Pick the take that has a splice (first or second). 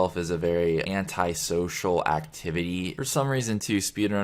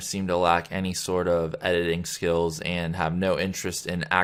first